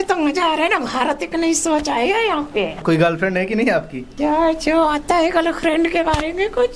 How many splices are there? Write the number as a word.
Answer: two